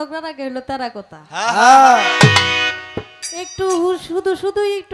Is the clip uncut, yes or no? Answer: yes